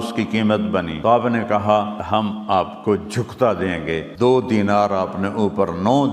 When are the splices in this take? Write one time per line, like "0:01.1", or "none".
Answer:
0:01.1
0:02.2
0:04.1